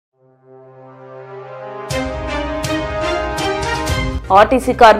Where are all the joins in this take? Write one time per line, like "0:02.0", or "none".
none